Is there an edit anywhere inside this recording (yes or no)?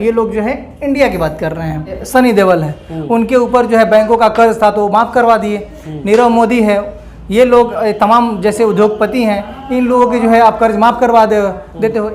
yes